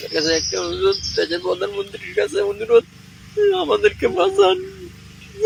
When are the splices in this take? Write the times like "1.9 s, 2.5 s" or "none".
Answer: none